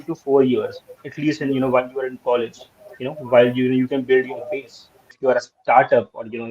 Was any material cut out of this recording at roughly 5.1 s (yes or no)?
yes